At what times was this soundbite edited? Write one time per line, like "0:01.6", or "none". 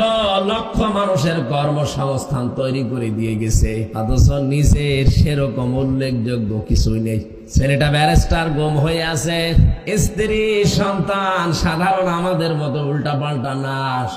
0:03.8
0:07.4
0:09.8